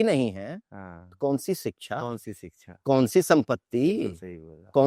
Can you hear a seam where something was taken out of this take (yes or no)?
no